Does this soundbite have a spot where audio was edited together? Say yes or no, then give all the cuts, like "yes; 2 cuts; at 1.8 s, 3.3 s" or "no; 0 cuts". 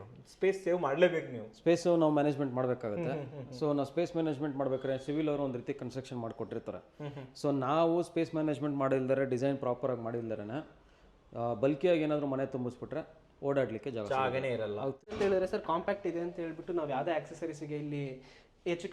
yes; 1 cut; at 15.1 s